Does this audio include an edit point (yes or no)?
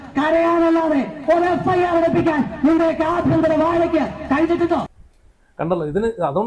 no